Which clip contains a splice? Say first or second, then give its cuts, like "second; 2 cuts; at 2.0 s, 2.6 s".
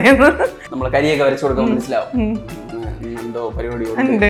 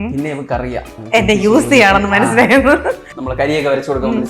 second; 1 cut; at 1.0 s